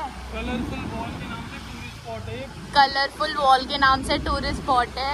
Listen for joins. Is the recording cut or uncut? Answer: uncut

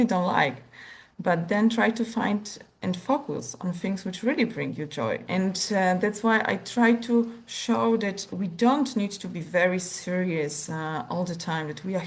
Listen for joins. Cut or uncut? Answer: uncut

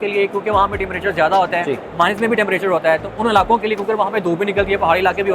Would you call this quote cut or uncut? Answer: uncut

